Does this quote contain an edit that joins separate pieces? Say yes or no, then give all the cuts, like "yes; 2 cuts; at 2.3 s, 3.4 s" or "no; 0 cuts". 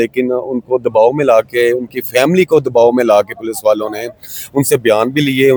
no; 0 cuts